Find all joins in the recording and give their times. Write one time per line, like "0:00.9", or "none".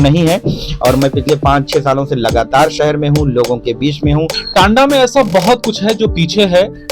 0:04.3

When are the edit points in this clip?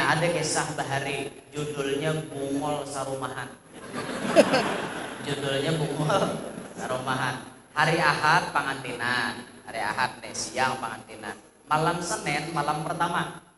0:04.9

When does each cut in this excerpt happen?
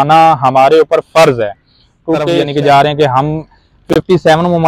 0:02.3

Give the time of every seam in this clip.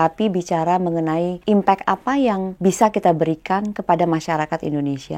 0:01.3
0:02.5

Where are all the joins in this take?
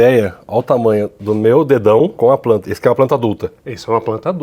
0:02.1

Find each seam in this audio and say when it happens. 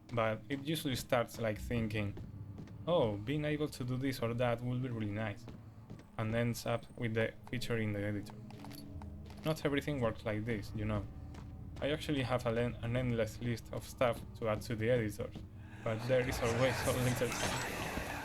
none

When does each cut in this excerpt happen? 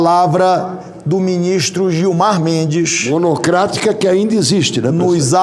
none

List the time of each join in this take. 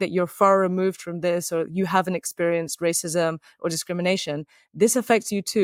none

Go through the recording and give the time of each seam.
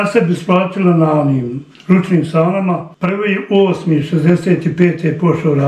0:02.9

